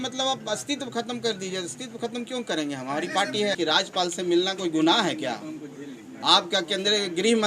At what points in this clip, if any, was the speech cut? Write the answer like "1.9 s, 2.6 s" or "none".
3.5 s